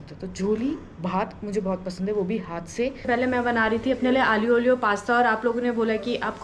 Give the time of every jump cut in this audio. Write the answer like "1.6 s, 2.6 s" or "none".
3.1 s